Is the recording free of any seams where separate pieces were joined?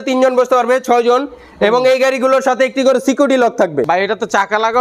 no; 1 cut; at 3.9 s

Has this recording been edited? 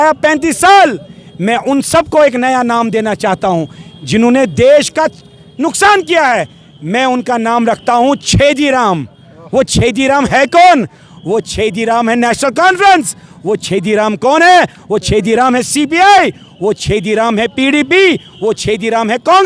no; 0 cuts

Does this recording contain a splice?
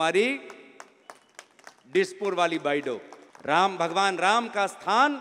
yes; 1 cut; at 3.1 s

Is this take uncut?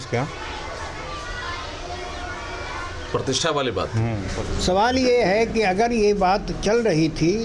no; 1 cut; at 4.3 s

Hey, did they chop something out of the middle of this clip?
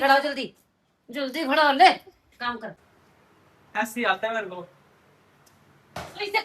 yes; 1 cut; at 2.8 s

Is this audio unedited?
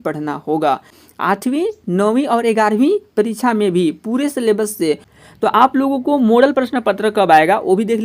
no; 2 cuts; at 0.9 s, 5.1 s

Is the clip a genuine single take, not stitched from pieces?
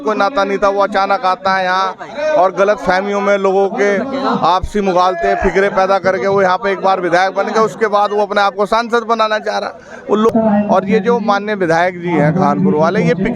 no; 1 cut; at 10.3 s

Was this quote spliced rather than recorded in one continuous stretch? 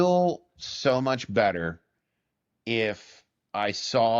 no; 0 cuts

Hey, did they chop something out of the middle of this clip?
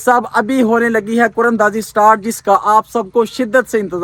no; 0 cuts

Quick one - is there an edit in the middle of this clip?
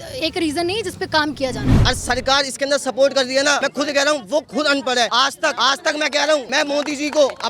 yes; 4 cuts; at 1.7 s, 3.6 s, 5.3 s, 6.5 s

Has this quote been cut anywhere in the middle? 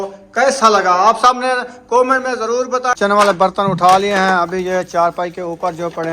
yes; 1 cut; at 3.0 s

